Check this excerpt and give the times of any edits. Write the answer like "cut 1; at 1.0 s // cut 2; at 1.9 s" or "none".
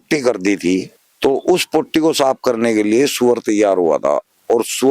cut 1; at 1.0 s